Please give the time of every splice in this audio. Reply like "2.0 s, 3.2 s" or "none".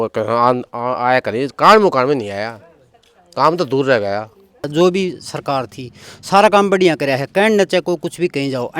4.7 s